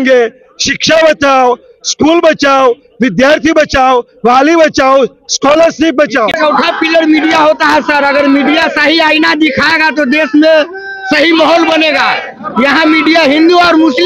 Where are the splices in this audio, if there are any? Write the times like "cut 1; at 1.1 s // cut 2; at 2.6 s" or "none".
cut 1; at 6.4 s